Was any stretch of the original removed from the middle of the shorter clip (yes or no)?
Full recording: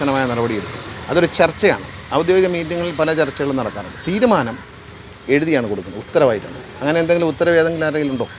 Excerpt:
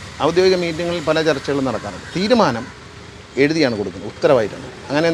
no